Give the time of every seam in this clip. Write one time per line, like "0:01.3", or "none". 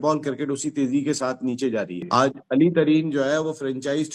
0:02.0